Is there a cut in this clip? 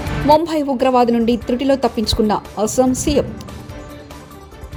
no; 0 cuts

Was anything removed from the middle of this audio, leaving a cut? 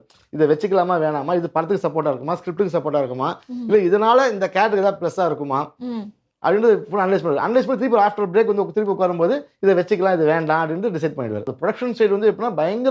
yes; 1 cut; at 11.5 s

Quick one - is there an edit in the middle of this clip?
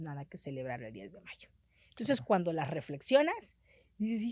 no; 0 cuts

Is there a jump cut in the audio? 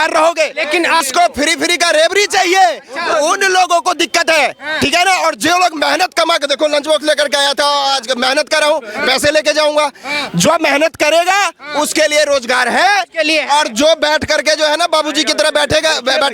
yes; 1 cut; at 1.1 s

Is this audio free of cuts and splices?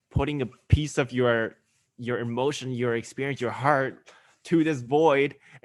yes; 0 cuts

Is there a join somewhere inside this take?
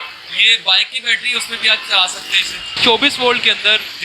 yes; 1 cut; at 2.7 s

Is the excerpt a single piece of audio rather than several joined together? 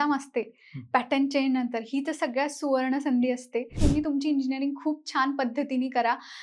no; 1 cut; at 3.7 s

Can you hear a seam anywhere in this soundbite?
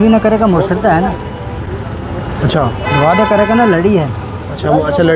no; 0 cuts

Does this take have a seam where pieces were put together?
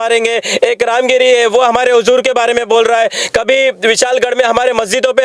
no; 0 cuts

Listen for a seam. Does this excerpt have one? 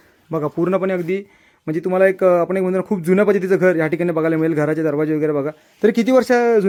no; 0 cuts

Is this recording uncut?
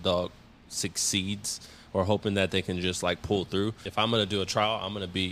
no; 1 cut; at 3.8 s

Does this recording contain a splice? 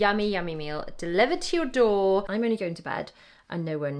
yes; 1 cut; at 2.3 s

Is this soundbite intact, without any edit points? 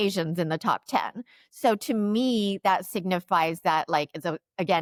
yes; 0 cuts

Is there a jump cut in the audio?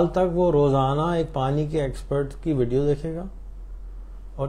no; 0 cuts

